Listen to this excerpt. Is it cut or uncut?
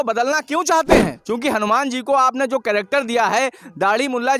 cut